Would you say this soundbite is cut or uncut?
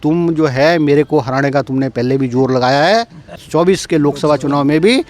cut